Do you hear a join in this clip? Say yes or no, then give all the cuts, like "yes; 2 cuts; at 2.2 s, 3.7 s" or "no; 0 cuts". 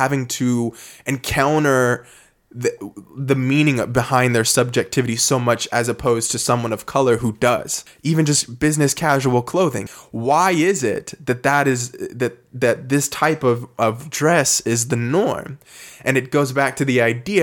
yes; 2 cuts; at 7.8 s, 9.8 s